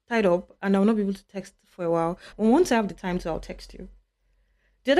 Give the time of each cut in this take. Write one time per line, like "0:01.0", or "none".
0:02.2